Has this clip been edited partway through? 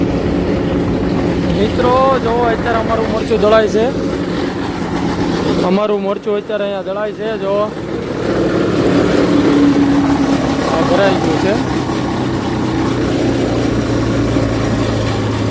no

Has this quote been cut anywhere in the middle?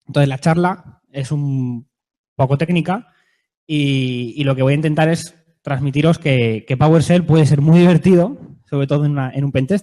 no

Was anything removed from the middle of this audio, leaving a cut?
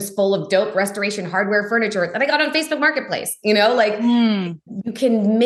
no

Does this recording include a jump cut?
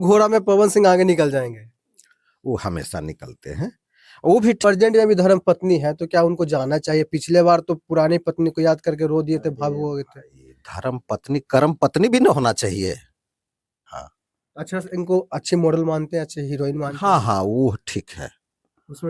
yes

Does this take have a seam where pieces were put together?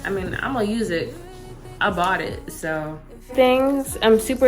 yes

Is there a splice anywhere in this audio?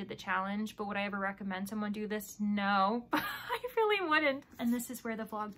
yes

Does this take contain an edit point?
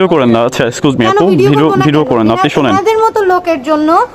no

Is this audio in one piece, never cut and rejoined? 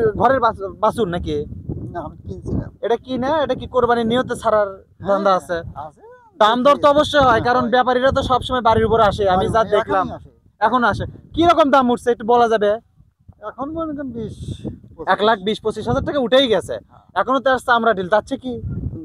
yes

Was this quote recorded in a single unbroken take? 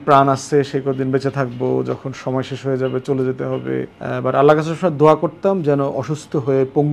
no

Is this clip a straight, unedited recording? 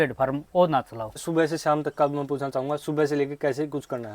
no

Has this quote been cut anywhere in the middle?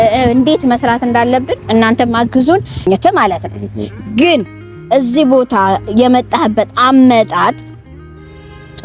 yes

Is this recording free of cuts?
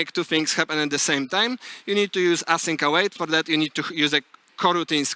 yes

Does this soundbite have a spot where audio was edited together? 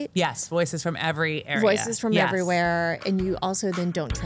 no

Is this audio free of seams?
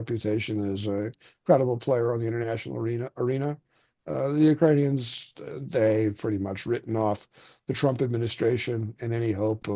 yes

